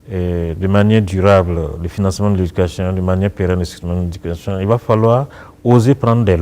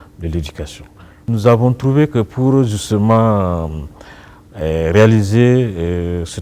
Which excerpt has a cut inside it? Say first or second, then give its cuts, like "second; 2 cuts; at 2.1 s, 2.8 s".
second; 1 cut; at 1.2 s